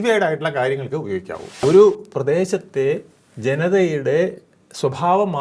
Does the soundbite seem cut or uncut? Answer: cut